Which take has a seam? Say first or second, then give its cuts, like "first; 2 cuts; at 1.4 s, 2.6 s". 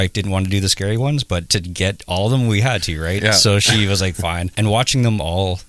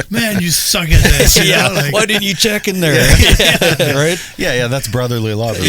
first; 2 cuts; at 1.5 s, 4.5 s